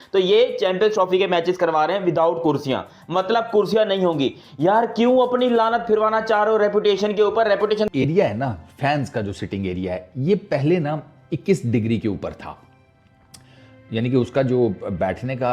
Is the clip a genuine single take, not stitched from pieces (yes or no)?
no